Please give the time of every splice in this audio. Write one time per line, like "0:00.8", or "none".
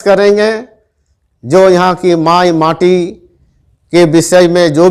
none